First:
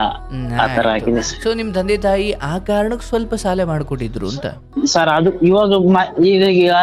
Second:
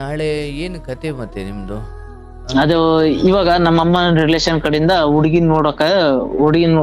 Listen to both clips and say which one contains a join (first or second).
first